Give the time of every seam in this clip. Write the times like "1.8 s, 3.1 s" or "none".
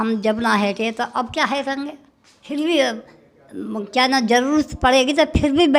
2.4 s